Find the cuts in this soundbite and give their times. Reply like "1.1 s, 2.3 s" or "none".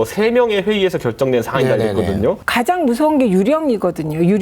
2.4 s